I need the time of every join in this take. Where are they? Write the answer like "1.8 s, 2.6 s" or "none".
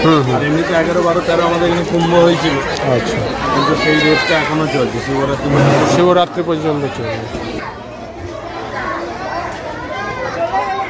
none